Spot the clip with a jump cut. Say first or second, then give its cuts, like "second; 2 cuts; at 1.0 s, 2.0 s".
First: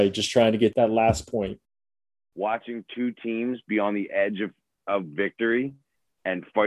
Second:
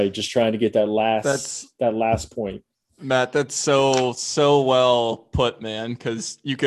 first; 2 cuts; at 0.7 s, 1.9 s